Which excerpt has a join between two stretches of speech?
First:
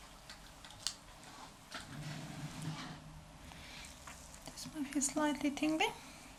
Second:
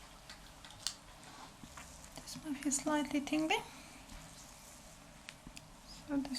second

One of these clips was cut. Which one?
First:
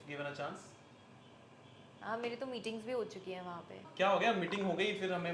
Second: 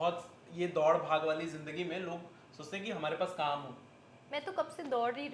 first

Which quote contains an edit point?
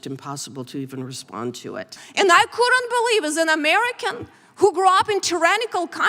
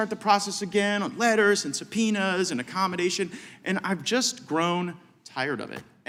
first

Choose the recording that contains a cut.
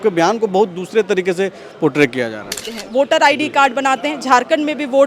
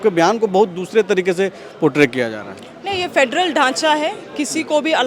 first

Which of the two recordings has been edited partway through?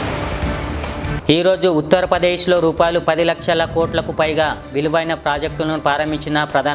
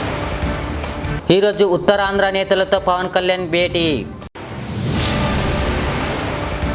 first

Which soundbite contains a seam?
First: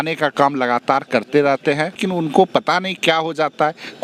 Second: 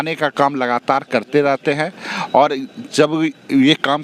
first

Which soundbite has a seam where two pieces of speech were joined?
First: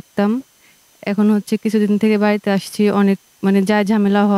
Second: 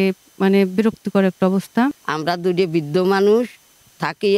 second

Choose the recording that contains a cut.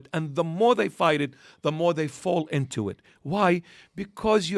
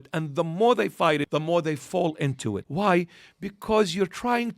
second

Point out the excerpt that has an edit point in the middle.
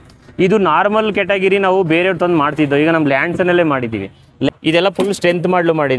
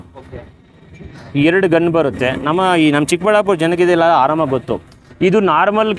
first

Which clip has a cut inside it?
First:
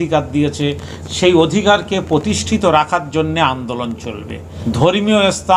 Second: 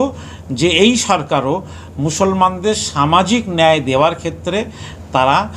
first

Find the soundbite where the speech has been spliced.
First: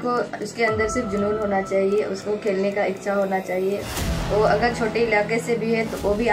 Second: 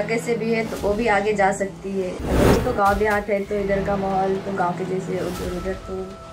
second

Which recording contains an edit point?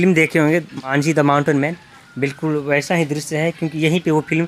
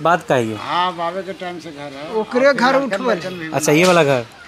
first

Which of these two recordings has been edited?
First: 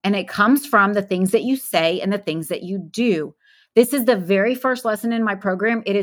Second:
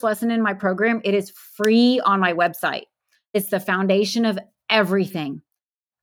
second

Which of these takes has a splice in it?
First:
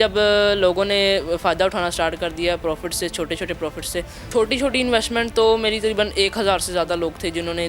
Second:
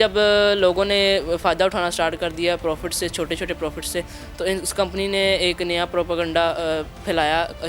first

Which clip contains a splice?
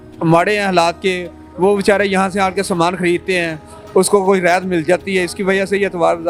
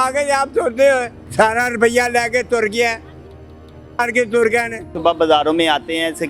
second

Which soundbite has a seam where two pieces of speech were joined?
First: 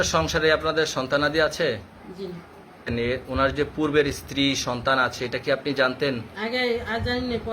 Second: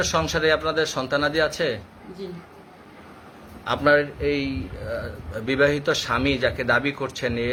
first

